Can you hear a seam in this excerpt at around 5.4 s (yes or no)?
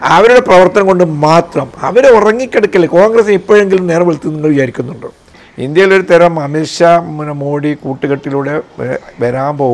yes